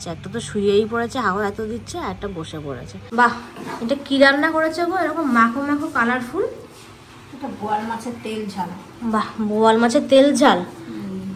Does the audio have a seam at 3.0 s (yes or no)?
yes